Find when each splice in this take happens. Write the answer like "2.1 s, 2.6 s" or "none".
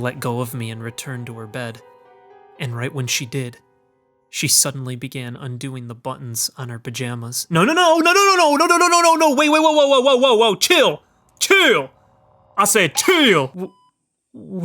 13.5 s